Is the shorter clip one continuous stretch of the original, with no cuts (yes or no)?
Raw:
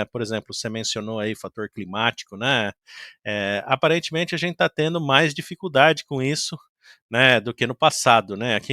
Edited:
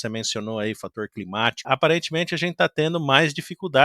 no